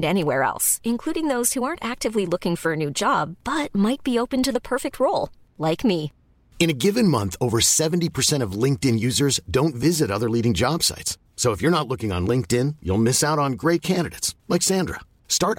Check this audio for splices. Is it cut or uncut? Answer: uncut